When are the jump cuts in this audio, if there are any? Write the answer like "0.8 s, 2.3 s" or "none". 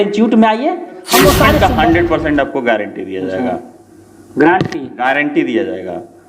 1.6 s